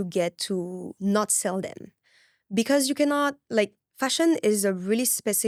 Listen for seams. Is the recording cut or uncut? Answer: uncut